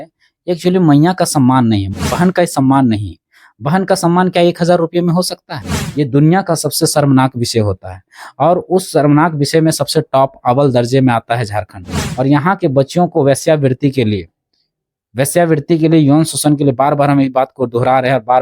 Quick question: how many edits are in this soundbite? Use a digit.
2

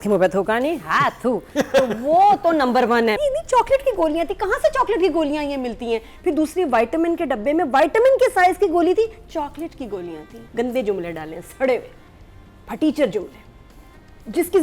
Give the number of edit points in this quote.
2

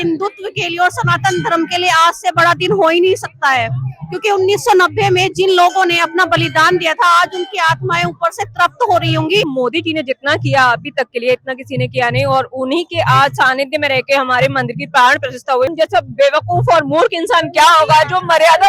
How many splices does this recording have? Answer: 2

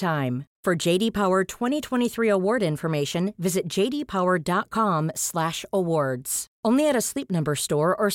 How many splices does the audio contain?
0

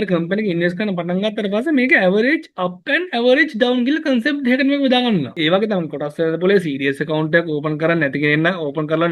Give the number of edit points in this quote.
1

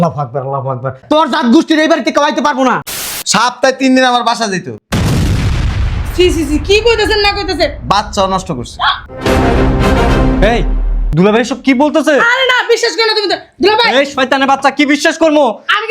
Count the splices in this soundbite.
1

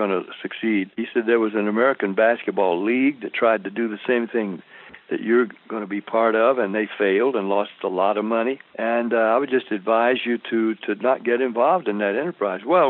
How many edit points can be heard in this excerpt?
2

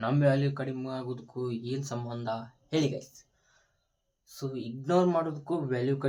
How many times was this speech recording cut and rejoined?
0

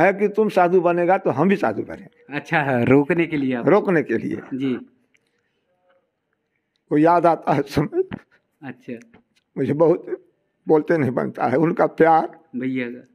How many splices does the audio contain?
0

